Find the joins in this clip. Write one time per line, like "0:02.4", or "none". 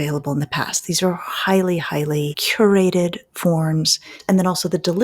0:02.4
0:04.1